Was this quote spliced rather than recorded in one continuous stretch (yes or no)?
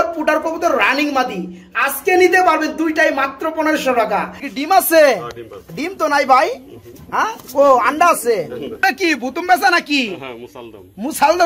yes